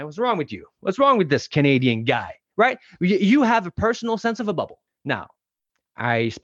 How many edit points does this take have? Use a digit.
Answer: 1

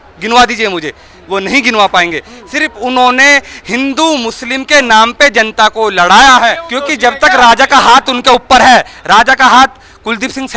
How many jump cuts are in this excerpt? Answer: 1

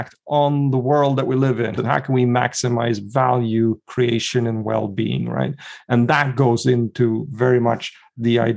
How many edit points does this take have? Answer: 1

